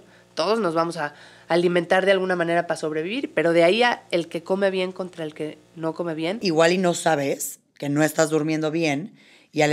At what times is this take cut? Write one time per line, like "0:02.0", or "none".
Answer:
0:06.4